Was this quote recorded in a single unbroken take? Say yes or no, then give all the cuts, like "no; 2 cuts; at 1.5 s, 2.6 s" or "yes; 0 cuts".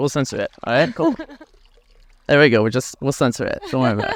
yes; 0 cuts